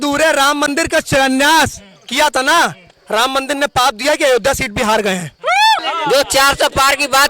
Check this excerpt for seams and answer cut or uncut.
cut